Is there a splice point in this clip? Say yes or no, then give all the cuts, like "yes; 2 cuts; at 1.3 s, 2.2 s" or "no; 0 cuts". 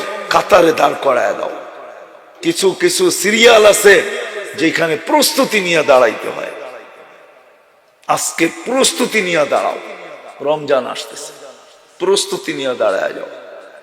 yes; 1 cut; at 2.3 s